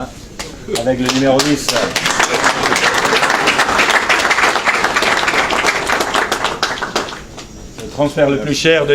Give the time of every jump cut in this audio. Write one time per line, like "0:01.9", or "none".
none